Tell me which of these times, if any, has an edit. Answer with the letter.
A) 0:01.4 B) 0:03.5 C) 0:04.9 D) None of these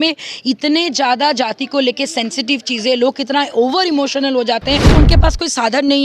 C